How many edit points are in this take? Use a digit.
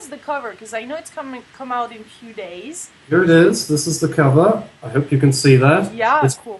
1